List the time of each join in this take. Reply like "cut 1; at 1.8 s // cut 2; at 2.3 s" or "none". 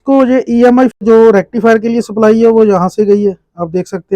cut 1; at 1.0 s